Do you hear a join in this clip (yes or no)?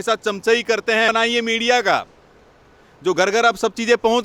yes